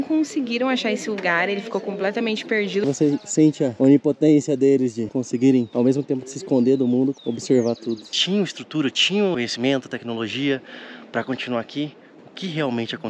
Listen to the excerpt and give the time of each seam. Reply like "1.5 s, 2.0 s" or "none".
2.8 s, 8.2 s, 9.3 s